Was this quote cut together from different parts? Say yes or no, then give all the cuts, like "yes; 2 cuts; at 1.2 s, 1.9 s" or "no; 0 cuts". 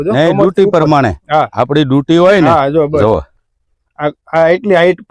no; 0 cuts